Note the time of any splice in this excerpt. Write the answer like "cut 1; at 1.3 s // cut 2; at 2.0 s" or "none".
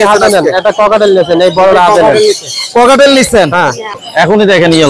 cut 1; at 3.9 s